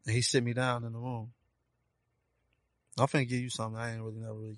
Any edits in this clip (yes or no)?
no